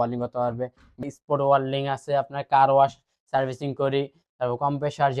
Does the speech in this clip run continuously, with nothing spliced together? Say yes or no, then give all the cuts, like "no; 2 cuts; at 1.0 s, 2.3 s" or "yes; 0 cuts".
no; 1 cut; at 0.9 s